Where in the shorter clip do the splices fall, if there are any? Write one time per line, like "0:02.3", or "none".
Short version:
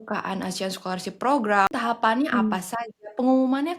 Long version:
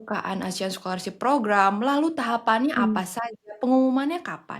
0:01.7

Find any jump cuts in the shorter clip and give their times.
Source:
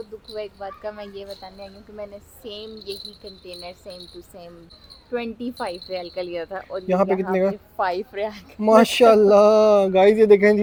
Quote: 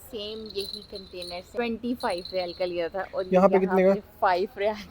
0:01.6

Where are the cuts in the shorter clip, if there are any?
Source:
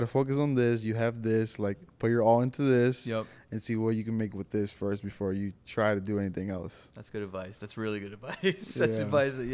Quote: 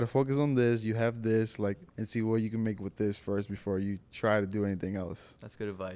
0:01.9

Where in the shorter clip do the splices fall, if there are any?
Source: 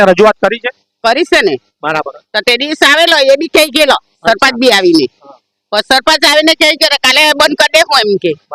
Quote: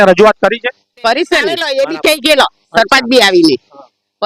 0:01.6

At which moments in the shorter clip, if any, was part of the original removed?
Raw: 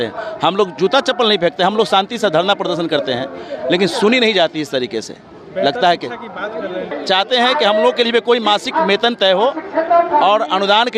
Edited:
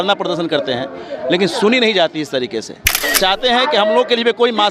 0:03.0

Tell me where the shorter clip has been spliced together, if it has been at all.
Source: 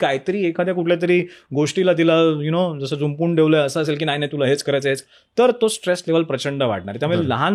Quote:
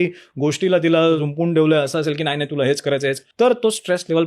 0:01.2
0:03.2

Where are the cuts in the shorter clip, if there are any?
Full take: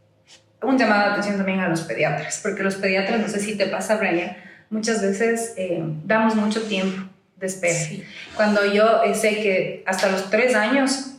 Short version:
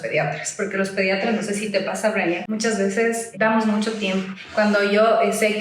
0:02.4
0:03.3
0:04.4

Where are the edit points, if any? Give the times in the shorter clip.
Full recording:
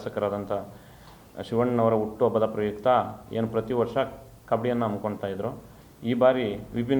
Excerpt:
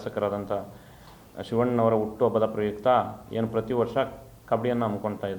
none

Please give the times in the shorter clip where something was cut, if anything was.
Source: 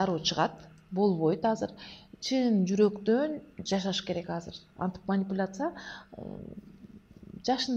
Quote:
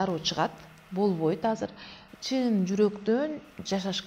none

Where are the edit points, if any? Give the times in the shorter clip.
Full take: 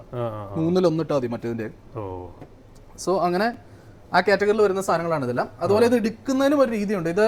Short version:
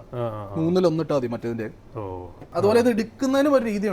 0:02.5

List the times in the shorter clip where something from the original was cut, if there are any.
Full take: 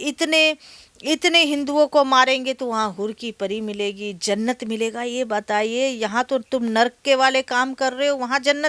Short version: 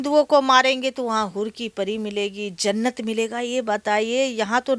none

